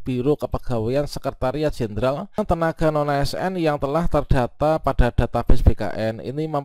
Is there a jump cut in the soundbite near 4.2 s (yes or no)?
no